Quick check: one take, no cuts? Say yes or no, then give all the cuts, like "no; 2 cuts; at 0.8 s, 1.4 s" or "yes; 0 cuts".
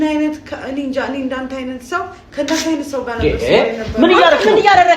yes; 0 cuts